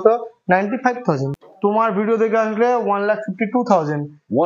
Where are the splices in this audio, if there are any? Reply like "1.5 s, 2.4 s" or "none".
1.3 s

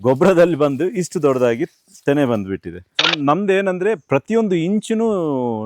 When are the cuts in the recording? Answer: 3.1 s

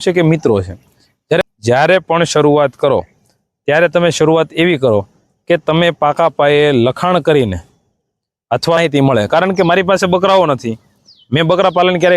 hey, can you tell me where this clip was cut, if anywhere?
1.4 s, 8.8 s

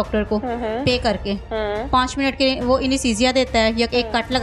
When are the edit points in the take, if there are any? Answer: none

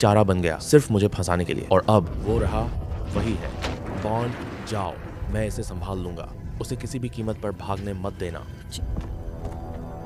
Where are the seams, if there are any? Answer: 3.7 s, 8.6 s

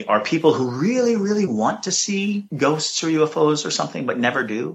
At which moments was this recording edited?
2.5 s

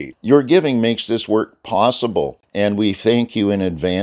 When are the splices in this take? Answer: 2.4 s

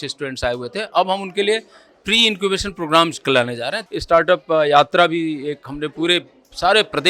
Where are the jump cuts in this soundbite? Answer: 3.8 s

